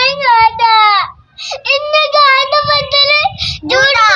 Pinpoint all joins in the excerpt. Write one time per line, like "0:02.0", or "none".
none

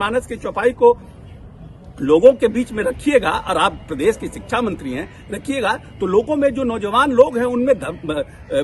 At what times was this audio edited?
none

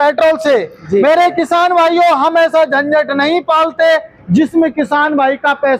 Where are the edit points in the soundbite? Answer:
none

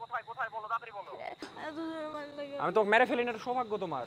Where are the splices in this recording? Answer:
0:01.5

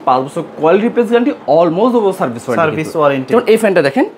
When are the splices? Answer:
none

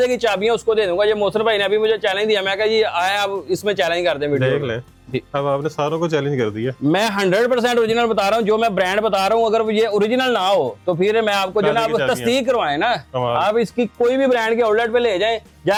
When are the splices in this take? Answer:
none

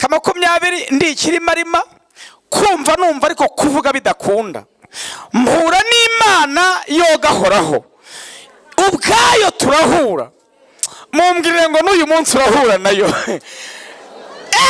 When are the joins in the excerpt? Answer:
none

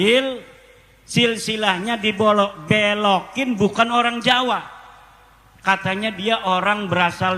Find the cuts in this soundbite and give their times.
none

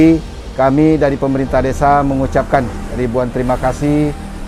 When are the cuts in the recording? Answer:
none

